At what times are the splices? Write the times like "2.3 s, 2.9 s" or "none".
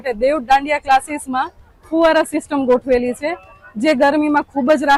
none